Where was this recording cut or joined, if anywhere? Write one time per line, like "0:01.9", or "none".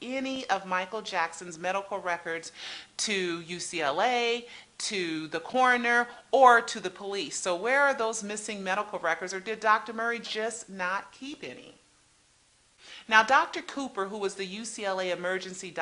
none